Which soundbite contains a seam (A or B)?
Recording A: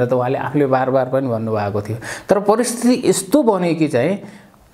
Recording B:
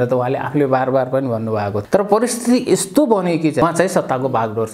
B